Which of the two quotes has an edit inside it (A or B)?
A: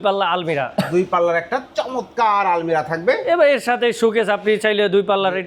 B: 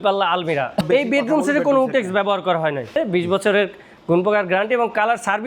B